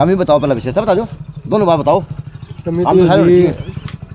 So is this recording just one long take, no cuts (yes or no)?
yes